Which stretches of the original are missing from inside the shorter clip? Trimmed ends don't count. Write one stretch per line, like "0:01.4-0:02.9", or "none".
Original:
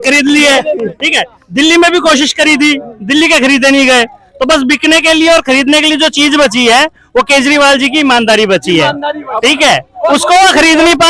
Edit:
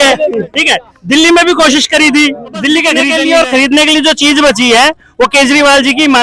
0:03.5-0:05.0